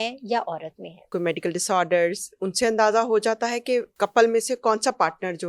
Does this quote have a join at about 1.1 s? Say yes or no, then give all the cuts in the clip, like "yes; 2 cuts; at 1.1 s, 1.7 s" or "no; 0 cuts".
yes; 2 cuts; at 1.1 s, 3.9 s